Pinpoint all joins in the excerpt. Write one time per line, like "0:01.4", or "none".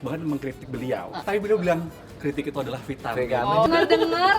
0:01.2
0:03.6